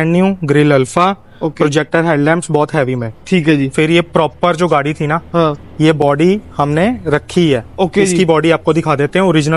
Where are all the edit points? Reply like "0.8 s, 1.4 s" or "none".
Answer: 6.5 s